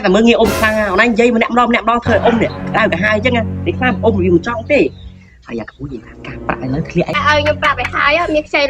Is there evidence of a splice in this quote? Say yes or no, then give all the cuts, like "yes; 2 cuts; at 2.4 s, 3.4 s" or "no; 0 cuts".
yes; 1 cut; at 7.2 s